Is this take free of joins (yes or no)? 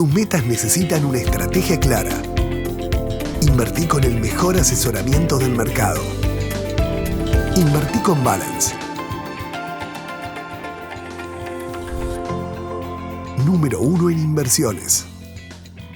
yes